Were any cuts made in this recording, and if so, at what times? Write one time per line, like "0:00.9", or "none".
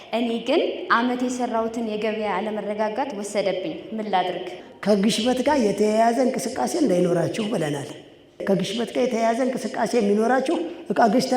0:04.5
0:08.4

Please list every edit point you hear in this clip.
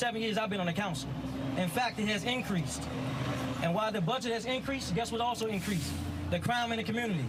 none

